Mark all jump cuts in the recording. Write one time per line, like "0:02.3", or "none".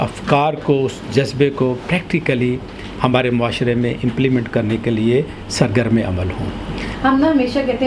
0:06.9